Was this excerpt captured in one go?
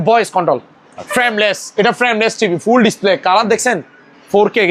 yes; 0 cuts

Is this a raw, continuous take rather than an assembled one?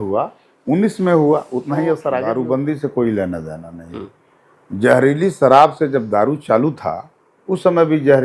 no; 1 cut; at 2.2 s

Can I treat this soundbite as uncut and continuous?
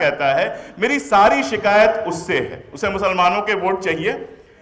no; 1 cut; at 2.7 s

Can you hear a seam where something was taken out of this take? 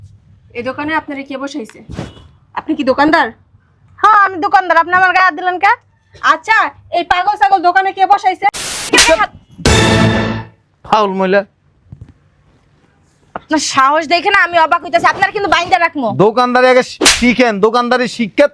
yes; 1 cut; at 8.8 s

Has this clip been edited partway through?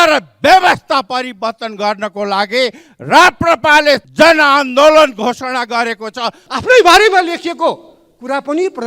yes; 2 cuts; at 4.1 s, 6.4 s

